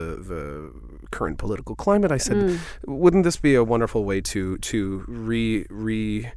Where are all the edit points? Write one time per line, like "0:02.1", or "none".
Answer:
none